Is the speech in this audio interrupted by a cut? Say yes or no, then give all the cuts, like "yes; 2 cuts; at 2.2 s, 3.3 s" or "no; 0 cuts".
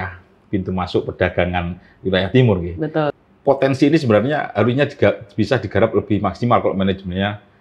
yes; 1 cut; at 3.1 s